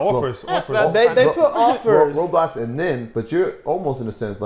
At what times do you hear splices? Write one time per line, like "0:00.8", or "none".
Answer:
0:03.1

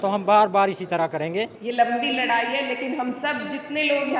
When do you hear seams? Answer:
0:01.6

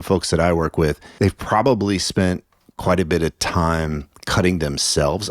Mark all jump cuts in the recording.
0:01.0

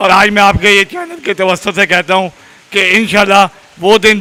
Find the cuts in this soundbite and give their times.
none

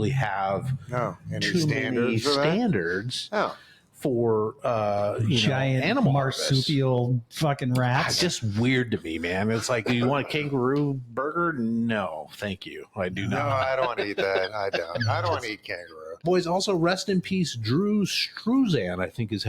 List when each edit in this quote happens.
0:16.2

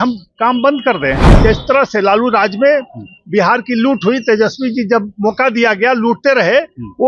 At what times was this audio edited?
0:01.3

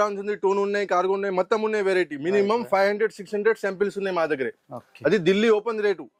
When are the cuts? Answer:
none

